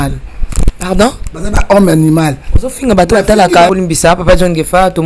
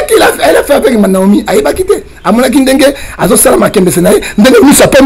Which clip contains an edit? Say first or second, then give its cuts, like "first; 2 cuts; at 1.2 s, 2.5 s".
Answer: first; 1 cut; at 3.7 s